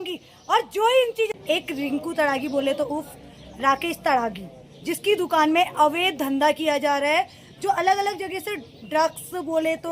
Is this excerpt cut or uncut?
cut